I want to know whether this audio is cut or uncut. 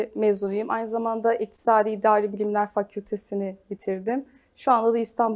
uncut